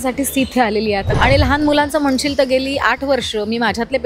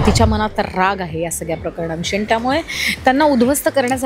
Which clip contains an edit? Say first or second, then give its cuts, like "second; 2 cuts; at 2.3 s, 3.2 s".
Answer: first; 1 cut; at 1.1 s